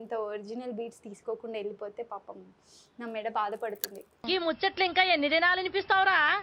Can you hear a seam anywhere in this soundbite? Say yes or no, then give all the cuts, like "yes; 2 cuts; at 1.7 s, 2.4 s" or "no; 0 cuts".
no; 0 cuts